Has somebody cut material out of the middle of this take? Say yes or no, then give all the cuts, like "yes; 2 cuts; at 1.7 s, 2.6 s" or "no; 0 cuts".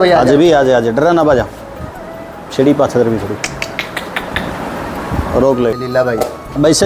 yes; 1 cut; at 5.8 s